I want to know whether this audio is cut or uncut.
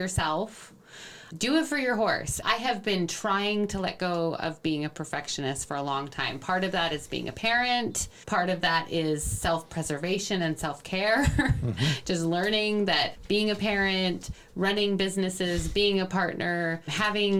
uncut